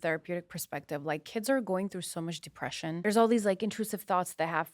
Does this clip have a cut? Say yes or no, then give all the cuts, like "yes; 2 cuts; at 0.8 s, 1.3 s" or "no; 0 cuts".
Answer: yes; 1 cut; at 3.0 s